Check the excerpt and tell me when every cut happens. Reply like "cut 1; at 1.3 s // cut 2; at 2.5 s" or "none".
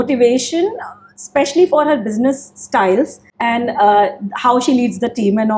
none